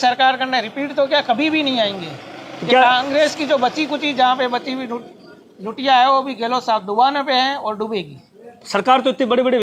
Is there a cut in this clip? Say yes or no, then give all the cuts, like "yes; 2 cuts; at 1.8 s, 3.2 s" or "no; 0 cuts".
no; 0 cuts